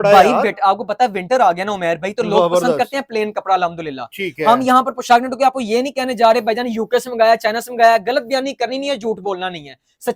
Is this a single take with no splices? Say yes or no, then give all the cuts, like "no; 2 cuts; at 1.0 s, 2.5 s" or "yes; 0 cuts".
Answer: yes; 0 cuts